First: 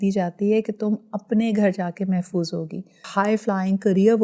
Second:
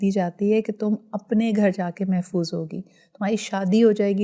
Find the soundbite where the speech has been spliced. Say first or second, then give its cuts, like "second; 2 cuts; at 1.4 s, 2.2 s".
first; 1 cut; at 3.1 s